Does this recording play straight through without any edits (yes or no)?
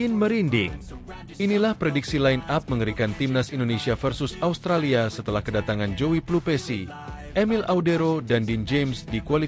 yes